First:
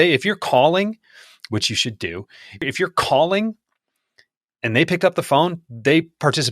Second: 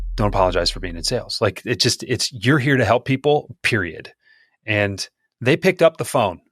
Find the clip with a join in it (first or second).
first